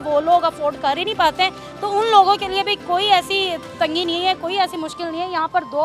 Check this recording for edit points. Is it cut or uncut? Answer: uncut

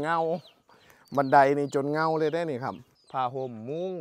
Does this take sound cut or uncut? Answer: cut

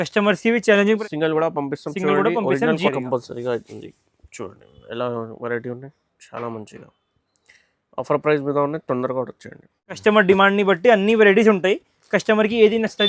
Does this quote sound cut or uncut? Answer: cut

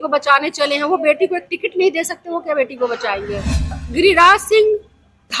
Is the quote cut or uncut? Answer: cut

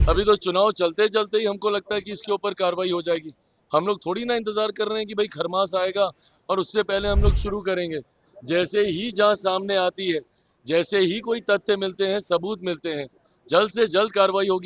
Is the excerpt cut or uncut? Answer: uncut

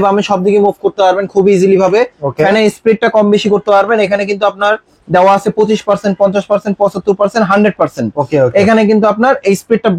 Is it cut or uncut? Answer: uncut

